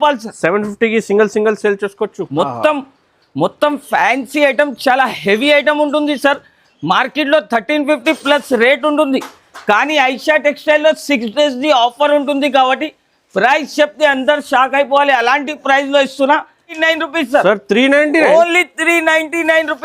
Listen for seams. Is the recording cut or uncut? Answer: cut